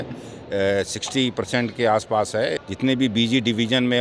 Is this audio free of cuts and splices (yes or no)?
no